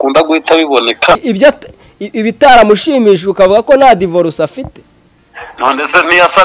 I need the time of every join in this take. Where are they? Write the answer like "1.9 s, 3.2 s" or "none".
1.2 s